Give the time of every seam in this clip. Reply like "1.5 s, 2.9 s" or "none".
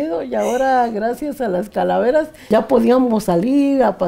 2.5 s

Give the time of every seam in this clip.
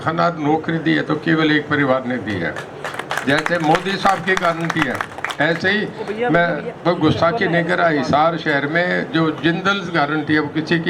none

